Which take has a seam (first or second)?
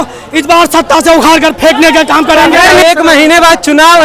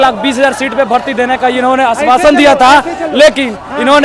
first